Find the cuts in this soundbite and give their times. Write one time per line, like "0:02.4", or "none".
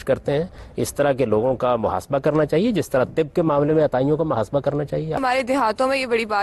0:05.2